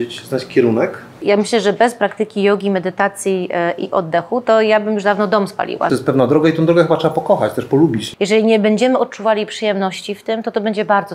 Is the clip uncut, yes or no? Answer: no